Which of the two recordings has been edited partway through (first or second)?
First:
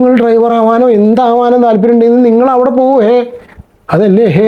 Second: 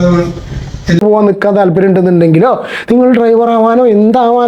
second